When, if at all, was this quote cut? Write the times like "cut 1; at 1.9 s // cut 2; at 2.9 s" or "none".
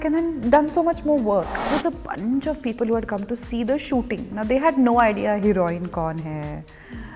cut 1; at 1.7 s